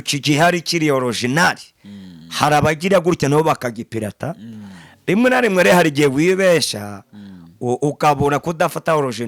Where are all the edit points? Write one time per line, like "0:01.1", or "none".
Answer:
none